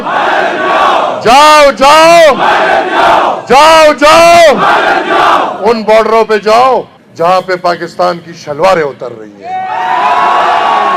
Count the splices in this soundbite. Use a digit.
0